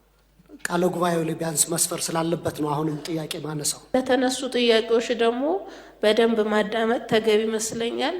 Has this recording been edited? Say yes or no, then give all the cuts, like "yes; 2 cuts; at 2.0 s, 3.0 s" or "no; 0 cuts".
yes; 1 cut; at 3.8 s